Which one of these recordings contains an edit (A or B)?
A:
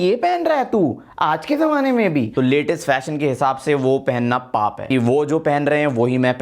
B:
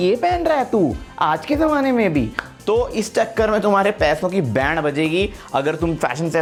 A